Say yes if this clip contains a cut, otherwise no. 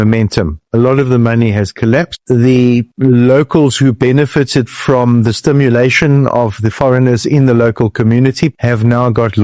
no